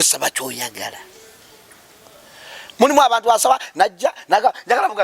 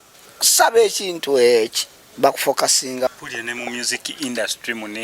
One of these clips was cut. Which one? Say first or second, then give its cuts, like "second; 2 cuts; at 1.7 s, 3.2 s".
second; 1 cut; at 3.1 s